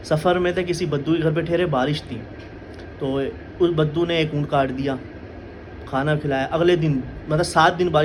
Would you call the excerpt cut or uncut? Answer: uncut